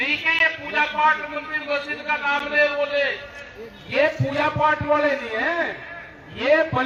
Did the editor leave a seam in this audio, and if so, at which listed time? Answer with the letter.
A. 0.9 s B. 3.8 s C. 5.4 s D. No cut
D